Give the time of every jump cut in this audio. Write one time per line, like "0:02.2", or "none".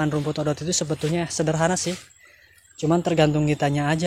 none